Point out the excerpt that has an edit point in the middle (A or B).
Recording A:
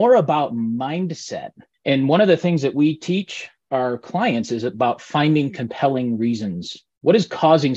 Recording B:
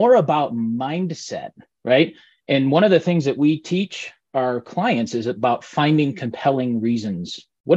A